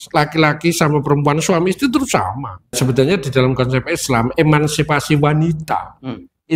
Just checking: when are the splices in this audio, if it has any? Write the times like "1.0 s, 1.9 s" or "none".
2.8 s